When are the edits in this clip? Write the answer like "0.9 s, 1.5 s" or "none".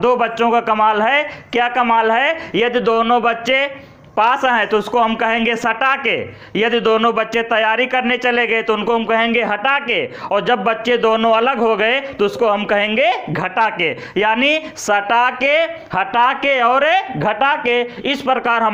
none

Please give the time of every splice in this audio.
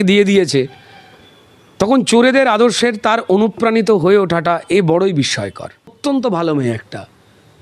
6.0 s

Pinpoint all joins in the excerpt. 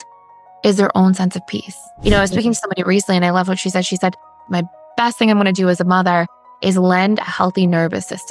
1.8 s, 4.5 s

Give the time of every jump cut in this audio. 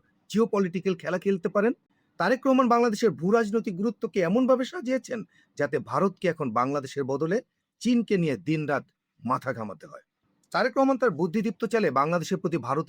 1.9 s

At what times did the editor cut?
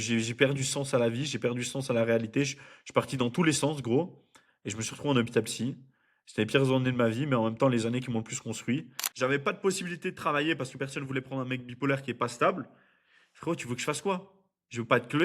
9.0 s

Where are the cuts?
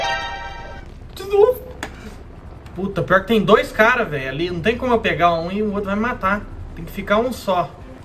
none

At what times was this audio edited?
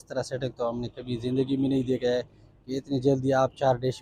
none

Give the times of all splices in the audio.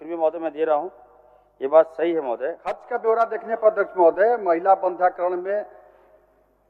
2.9 s

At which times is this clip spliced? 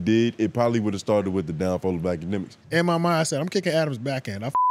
2.6 s

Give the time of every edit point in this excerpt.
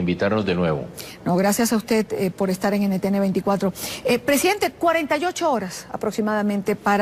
none

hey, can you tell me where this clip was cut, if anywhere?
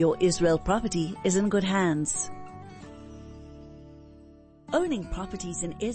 2.1 s, 4.5 s

